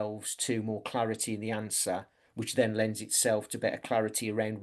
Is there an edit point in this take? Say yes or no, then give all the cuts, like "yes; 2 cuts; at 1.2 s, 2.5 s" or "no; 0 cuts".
no; 0 cuts